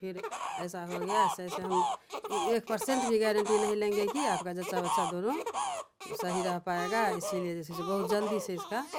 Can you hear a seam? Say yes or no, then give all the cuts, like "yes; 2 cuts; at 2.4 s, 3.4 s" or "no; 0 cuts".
no; 0 cuts